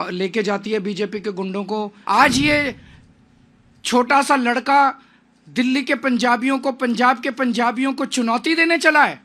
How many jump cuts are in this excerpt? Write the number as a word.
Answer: one